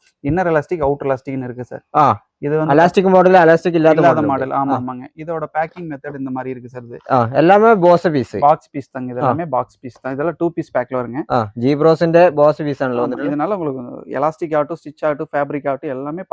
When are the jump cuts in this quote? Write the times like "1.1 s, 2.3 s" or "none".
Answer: none